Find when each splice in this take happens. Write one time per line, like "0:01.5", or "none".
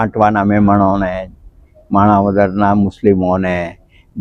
none